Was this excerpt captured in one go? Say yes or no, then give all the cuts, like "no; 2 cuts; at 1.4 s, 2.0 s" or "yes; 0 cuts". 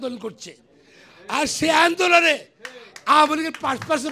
yes; 0 cuts